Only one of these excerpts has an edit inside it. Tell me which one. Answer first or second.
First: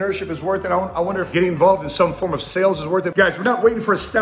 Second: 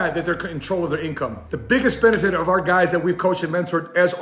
first